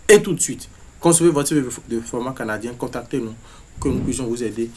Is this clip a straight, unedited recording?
no; 1 cut; at 1.8 s

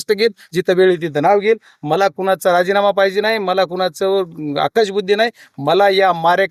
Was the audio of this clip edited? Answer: no; 0 cuts

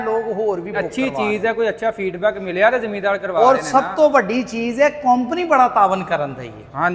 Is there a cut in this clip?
no; 0 cuts

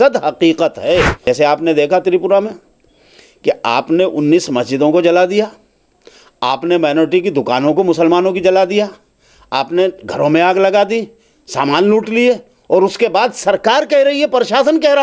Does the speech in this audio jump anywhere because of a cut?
yes; 1 cut; at 1.2 s

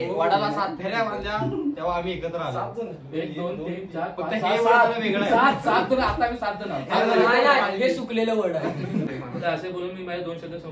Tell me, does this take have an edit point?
yes; 1 cut; at 9.1 s

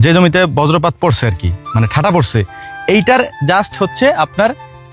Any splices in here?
no; 0 cuts

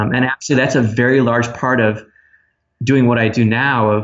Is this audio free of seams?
yes; 0 cuts

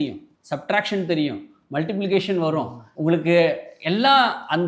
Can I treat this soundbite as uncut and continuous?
yes; 0 cuts

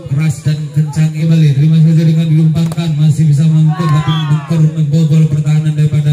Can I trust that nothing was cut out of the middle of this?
no; 1 cut; at 1.3 s

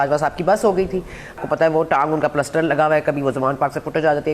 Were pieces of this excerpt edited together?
yes; 1 cut; at 1.4 s

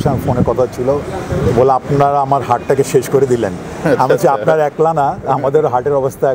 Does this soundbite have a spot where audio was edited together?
no; 0 cuts

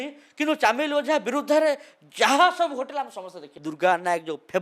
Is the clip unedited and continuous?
no; 1 cut; at 3.6 s

